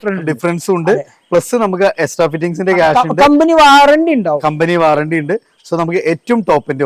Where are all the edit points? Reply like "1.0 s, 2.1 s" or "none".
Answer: none